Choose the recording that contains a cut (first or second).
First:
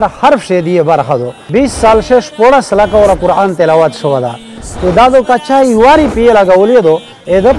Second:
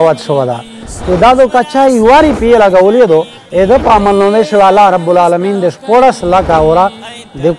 first